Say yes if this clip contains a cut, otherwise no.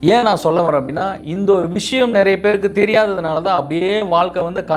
no